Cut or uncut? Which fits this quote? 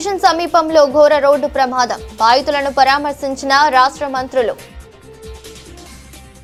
uncut